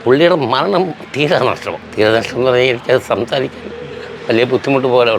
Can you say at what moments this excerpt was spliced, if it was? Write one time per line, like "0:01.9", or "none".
0:01.8